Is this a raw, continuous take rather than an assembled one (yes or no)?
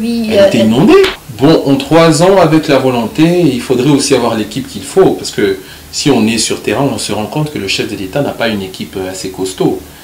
no